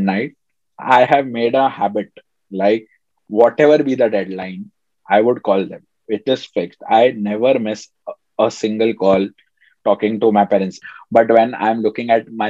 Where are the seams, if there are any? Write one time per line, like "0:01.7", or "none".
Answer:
0:10.7